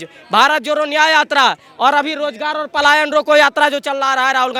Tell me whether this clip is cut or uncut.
uncut